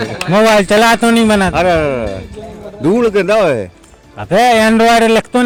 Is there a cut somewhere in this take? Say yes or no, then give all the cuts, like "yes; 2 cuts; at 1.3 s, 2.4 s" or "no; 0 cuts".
no; 0 cuts